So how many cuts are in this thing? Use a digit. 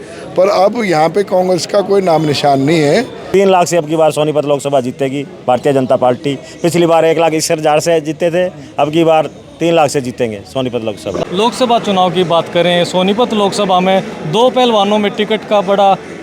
2